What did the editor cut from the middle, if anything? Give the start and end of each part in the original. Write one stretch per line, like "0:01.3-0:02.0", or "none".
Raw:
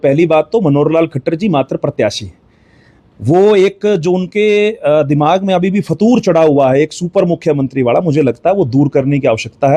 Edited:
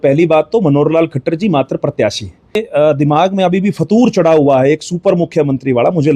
0:02.6-0:04.7

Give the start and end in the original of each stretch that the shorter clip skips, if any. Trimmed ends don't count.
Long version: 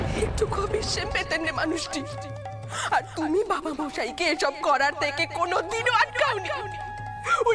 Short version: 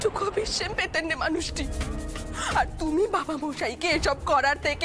none

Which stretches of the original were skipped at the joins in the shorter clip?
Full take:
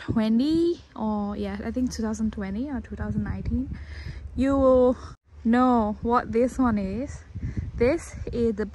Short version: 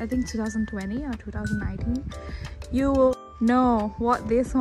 0:04.8-0:05.2

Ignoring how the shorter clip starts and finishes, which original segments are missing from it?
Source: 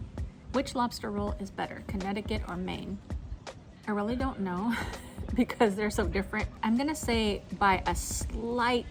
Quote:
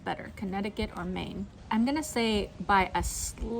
0:03.1-0:06.5

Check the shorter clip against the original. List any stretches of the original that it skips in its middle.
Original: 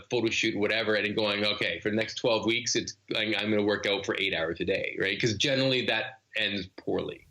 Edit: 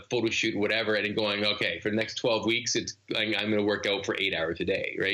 none

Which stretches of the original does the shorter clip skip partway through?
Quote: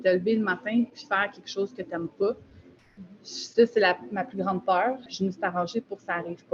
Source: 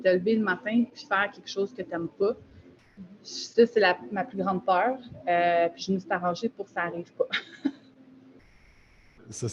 0:05.1-0:05.8

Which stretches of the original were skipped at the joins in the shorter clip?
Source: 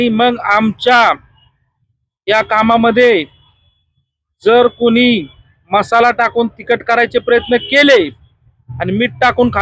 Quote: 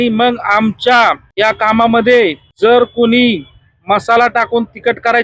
0:01.2-0:02.2
0:03.3-0:04.3

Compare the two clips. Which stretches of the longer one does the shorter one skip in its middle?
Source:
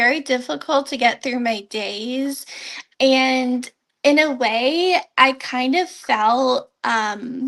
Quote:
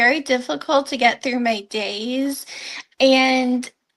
none

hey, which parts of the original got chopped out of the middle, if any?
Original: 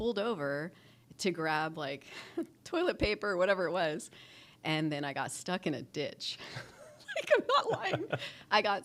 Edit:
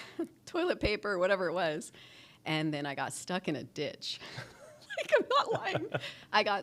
none

